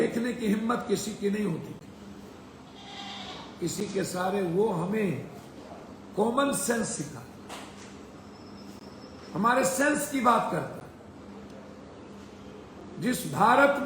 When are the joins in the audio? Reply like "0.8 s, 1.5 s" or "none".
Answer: 2.9 s